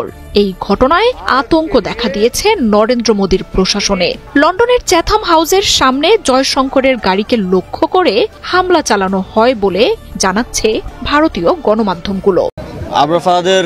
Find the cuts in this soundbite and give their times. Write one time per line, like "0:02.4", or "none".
0:12.6